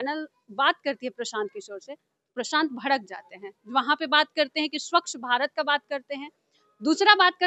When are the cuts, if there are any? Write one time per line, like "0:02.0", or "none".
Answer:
none